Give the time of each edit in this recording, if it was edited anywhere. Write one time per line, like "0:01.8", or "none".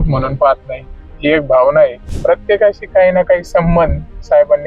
0:02.1